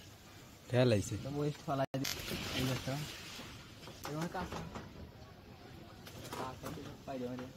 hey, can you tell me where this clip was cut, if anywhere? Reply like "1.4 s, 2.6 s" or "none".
2.0 s